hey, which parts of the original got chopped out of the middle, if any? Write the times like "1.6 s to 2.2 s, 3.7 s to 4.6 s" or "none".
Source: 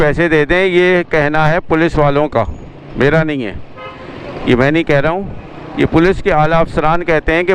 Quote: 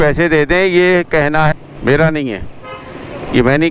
1.5 s to 2.6 s